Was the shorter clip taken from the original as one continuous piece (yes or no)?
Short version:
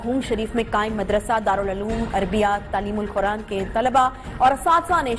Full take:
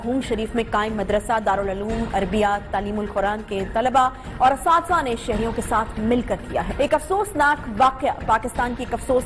yes